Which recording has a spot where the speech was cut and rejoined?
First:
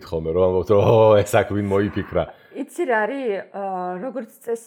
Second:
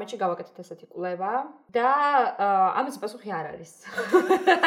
second; 1 cut; at 1.6 s

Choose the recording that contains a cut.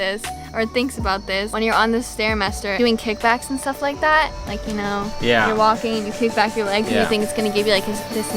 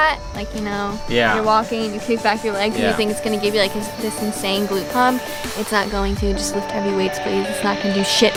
first; 2 cuts; at 1.5 s, 2.7 s

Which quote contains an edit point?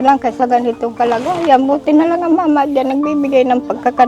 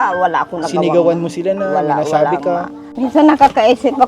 second; 1 cut; at 2.8 s

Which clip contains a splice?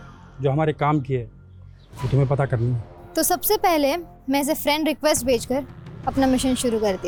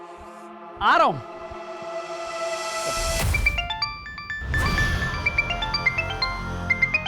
second; 1 cut; at 3.4 s

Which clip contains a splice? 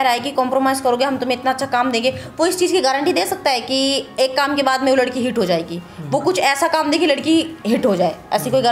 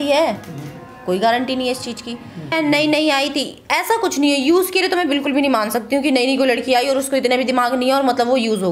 second; 1 cut; at 2.5 s

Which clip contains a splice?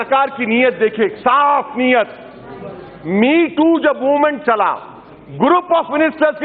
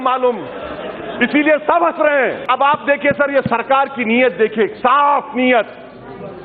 second; 1 cut; at 2.4 s

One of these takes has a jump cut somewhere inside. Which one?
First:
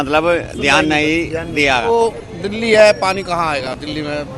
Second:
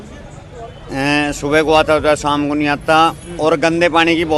first; 1 cut; at 1.9 s

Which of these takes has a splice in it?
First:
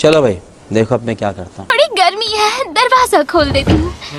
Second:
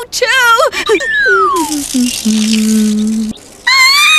first; 1 cut; at 1.3 s

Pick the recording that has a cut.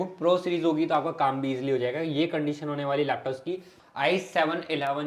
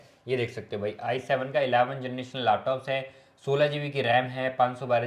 first; 1 cut; at 3.7 s

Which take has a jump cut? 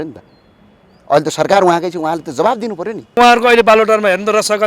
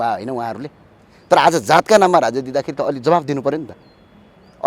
first; 1 cut; at 3.2 s

